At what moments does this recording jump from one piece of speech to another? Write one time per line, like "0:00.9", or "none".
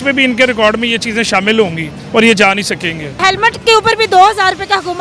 0:01.9
0:03.1